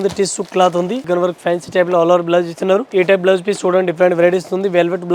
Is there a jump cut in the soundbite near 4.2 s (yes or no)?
no